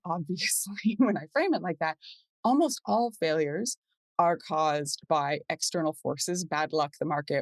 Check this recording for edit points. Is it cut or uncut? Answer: uncut